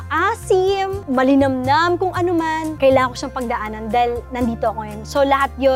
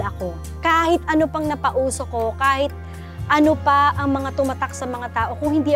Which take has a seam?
first; 2 cuts; at 1.0 s, 2.7 s

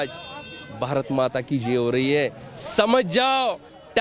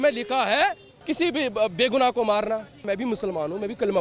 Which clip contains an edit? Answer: second; 2 cuts; at 0.9 s, 2.9 s

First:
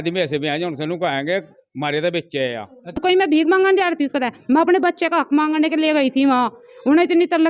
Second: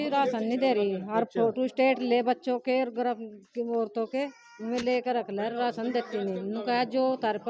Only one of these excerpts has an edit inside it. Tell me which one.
first; 1 cut; at 3.0 s

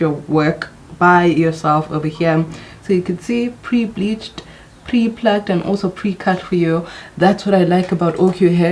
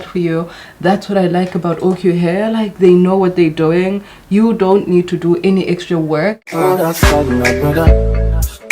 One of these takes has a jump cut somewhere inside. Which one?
second; 1 cut; at 6.4 s

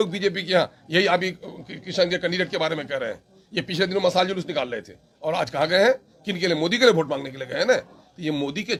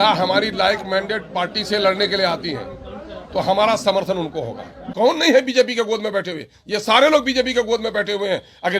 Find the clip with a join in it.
second; 1 cut; at 4.8 s

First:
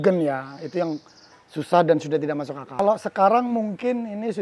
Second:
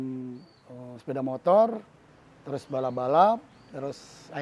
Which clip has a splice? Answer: first; 1 cut; at 2.8 s

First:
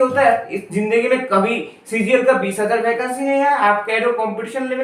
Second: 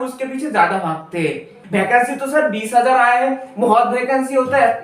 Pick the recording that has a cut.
second; 1 cut; at 1.6 s

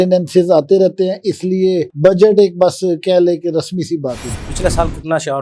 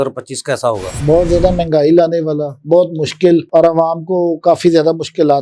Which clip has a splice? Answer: first; 1 cut; at 4.3 s

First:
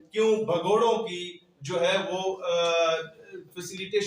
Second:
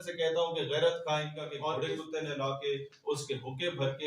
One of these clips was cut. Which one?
second; 1 cut; at 1.5 s

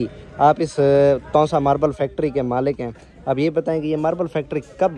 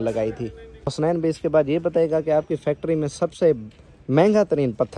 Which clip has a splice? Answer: second; 1 cut; at 0.9 s

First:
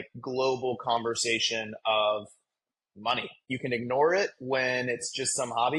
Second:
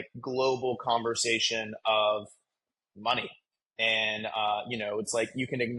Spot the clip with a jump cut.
first; 1 cut; at 3.4 s

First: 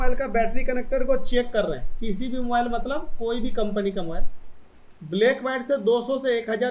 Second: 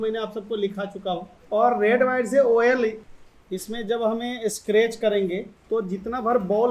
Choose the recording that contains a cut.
second; 3 cuts; at 1.3 s, 3.0 s, 5.5 s

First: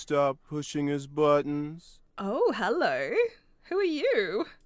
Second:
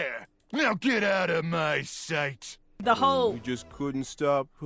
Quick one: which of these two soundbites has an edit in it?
second; 1 cut; at 2.7 s

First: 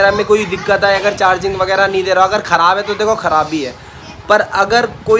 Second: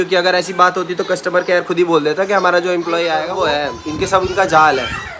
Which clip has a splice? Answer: second; 1 cut; at 3.3 s

